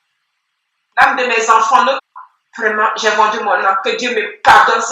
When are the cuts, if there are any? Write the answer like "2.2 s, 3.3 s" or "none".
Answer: 2.0 s